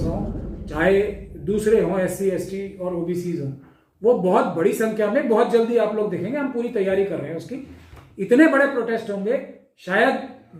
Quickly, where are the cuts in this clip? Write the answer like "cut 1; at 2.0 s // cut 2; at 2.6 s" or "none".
none